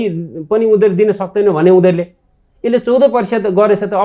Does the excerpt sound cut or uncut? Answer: uncut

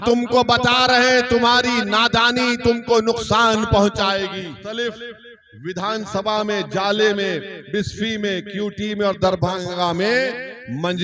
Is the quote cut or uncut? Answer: cut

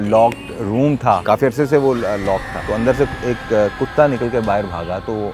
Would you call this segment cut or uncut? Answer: cut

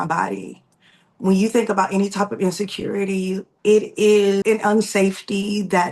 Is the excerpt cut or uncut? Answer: cut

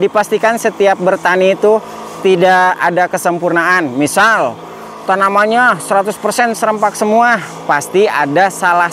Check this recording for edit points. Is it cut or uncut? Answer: uncut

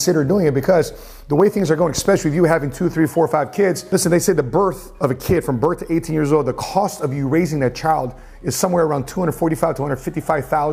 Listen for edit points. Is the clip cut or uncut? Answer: uncut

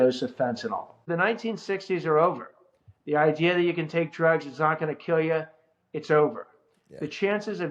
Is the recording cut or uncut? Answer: cut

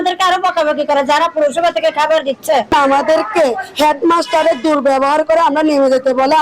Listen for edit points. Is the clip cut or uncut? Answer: uncut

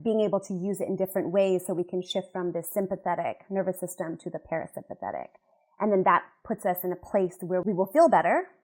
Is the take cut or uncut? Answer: cut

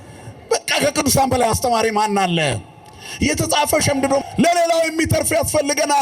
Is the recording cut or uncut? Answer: cut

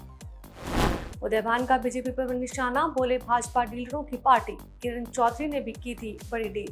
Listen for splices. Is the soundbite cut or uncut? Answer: uncut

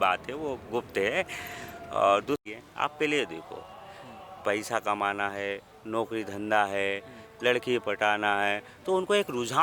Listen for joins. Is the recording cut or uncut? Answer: cut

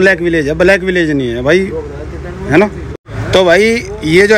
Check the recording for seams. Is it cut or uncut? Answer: cut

